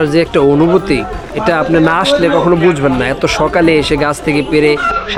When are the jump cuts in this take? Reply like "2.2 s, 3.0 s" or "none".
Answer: none